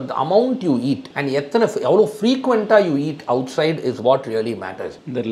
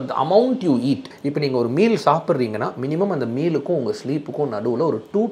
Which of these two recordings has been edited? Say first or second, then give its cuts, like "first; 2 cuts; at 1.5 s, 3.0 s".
second; 1 cut; at 1.1 s